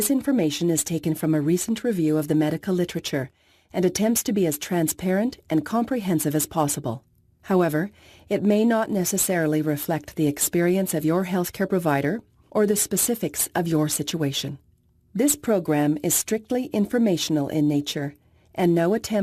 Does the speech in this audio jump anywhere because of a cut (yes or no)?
no